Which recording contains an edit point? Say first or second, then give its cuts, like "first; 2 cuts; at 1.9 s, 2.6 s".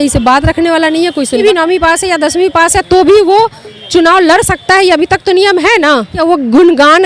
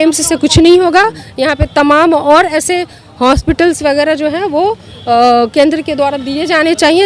first; 2 cuts; at 1.4 s, 6.2 s